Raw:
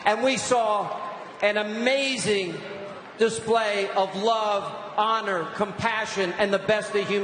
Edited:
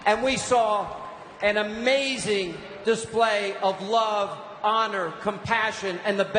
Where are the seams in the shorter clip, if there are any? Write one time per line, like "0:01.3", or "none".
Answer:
0:02.6